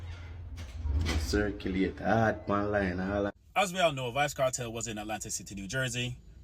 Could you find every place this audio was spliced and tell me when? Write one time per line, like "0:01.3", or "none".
0:03.3